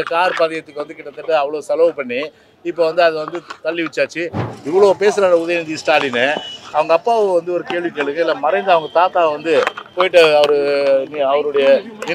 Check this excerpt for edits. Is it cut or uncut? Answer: cut